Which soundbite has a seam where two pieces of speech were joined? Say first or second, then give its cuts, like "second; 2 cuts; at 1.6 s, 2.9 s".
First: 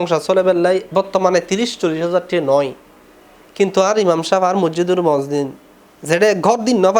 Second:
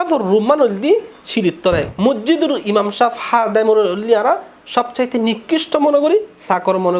second; 1 cut; at 1.9 s